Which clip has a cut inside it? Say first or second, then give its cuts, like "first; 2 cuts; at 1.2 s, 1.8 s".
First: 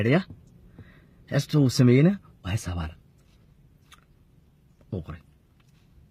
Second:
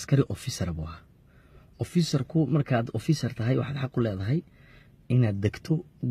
second; 1 cut; at 3.2 s